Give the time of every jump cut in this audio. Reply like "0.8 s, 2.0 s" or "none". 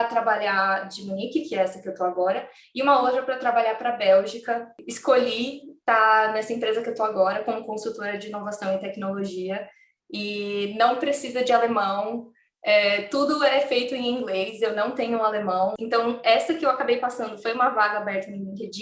4.9 s, 15.8 s